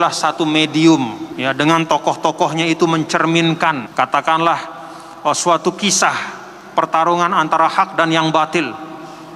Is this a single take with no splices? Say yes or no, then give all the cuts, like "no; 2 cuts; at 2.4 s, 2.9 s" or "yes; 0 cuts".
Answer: no; 2 cuts; at 1.2 s, 3.9 s